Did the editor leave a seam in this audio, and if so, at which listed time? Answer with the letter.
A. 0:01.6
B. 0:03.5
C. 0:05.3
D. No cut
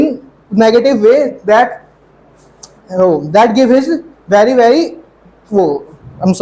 D